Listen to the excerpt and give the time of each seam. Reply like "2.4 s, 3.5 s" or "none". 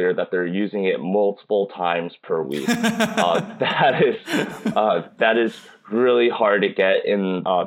none